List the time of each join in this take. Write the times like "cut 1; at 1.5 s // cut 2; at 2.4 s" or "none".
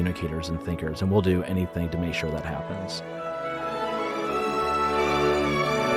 cut 1; at 2.6 s